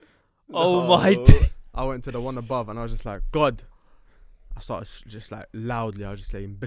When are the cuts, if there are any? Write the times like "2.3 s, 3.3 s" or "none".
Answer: none